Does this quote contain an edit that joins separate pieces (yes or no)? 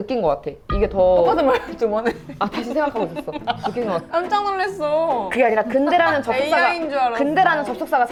no